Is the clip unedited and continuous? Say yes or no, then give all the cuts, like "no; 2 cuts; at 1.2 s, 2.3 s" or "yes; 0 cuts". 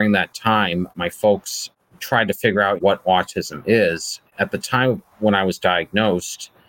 no; 3 cuts; at 0.9 s, 2.8 s, 4.3 s